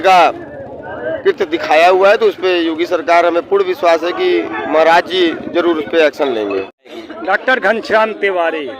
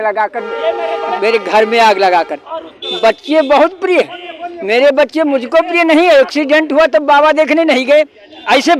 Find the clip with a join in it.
first; 1 cut; at 6.8 s

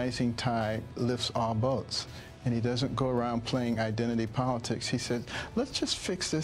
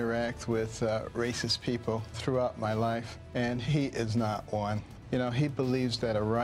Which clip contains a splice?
second; 3 cuts; at 2.2 s, 3.2 s, 4.9 s

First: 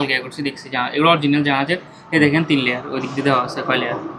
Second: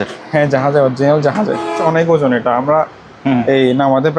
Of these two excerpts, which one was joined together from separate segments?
second; 1 cut; at 1.8 s

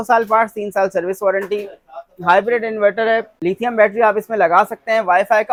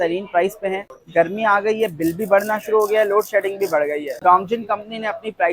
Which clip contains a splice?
second; 2 cuts; at 0.9 s, 4.2 s

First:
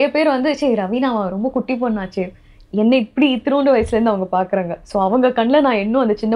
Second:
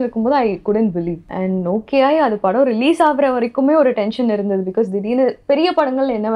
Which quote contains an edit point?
second; 1 cut; at 1.2 s

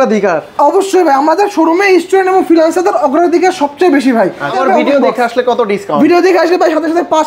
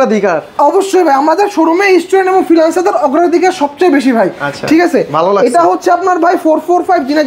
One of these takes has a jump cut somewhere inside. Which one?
first; 1 cut; at 4.6 s

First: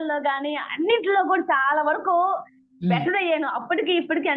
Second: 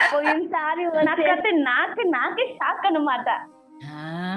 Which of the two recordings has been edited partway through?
second; 1 cut; at 1.3 s

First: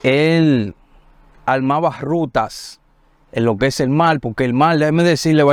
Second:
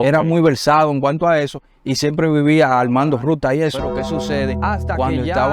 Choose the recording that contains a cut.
second; 1 cut; at 3.8 s

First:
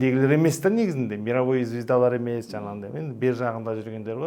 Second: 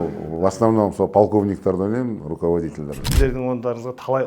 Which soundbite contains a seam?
second; 1 cut; at 3.0 s

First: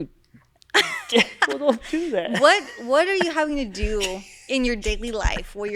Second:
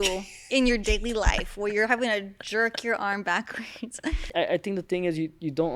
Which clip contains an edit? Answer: second; 1 cut; at 4.2 s

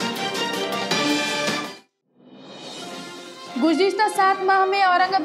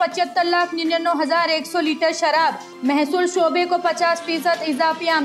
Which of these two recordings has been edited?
first; 1 cut; at 1.8 s

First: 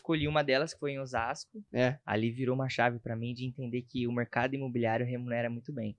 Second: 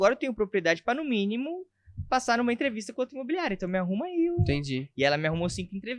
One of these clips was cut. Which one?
first; 1 cut; at 1.6 s

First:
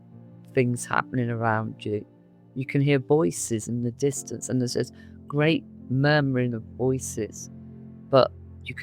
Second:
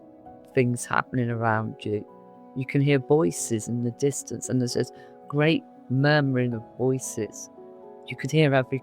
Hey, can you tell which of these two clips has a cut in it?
second; 1 cut; at 7.9 s

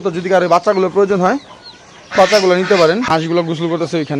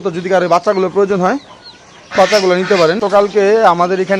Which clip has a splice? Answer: second; 1 cut; at 3.0 s

